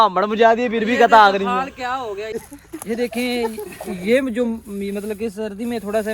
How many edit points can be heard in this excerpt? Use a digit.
1